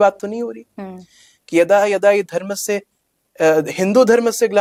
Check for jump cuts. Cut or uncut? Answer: uncut